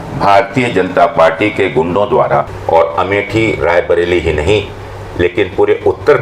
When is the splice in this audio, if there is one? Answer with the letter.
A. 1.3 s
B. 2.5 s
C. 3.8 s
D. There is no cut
B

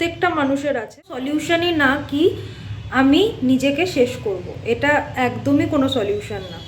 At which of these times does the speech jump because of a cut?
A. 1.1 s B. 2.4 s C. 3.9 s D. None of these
A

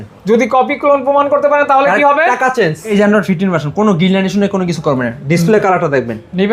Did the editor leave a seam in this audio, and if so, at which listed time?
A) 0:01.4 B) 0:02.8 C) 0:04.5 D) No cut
B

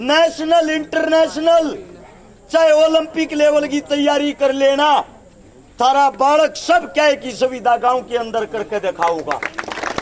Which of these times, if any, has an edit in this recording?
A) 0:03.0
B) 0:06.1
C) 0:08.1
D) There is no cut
D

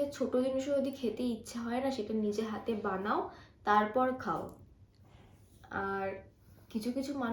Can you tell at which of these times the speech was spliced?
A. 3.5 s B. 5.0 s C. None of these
C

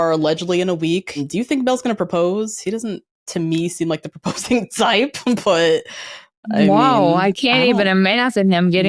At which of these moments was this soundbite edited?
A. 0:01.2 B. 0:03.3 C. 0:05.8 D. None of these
A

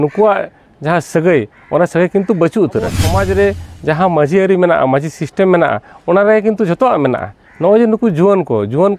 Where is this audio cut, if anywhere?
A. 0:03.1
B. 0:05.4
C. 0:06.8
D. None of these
A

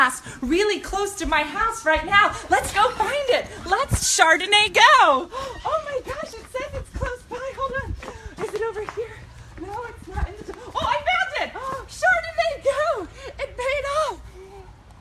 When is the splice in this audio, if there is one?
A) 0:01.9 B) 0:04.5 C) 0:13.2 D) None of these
C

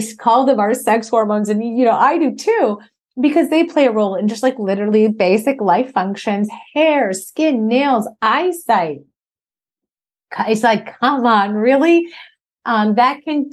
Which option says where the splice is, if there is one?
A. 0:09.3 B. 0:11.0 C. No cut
C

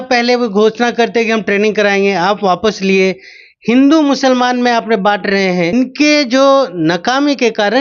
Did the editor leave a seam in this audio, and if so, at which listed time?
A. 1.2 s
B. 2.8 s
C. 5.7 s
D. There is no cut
C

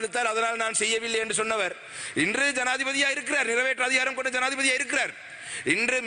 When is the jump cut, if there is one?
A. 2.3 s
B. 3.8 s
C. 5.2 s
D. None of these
D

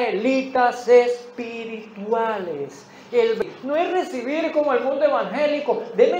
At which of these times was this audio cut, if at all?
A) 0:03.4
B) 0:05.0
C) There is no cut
A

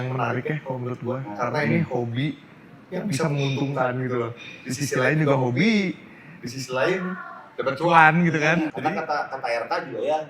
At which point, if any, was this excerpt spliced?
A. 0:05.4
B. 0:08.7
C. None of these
B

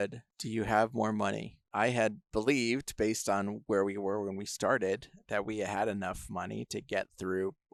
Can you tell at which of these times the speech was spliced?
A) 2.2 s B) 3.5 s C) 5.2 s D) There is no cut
D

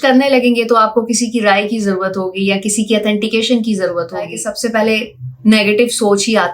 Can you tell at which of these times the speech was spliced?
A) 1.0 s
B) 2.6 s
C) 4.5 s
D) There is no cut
C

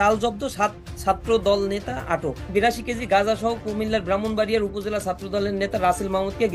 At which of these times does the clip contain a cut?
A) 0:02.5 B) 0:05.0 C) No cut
A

